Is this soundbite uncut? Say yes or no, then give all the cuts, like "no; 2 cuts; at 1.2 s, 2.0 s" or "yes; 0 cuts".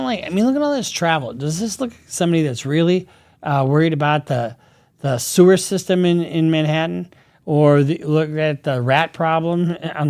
yes; 0 cuts